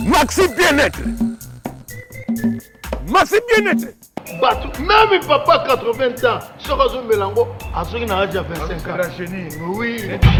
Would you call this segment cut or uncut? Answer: uncut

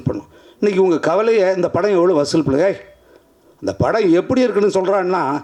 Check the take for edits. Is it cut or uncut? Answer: uncut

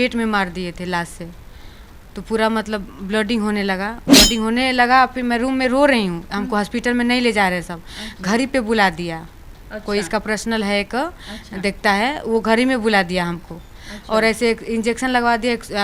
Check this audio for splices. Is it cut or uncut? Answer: cut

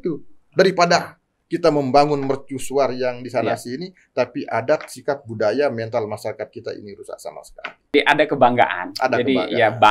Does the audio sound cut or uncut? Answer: cut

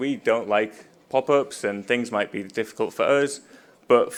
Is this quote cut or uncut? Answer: uncut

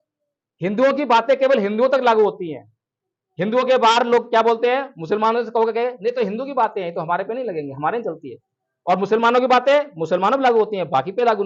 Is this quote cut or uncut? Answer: uncut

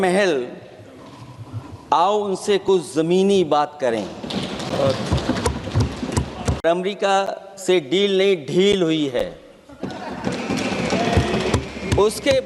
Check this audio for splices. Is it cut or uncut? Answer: cut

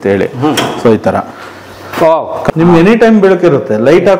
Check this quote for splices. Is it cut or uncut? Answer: cut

